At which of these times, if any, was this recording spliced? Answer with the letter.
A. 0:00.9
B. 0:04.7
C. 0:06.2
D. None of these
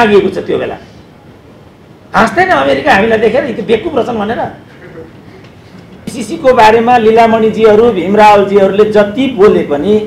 C